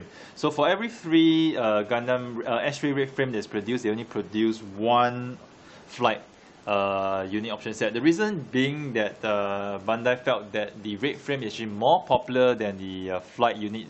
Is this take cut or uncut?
uncut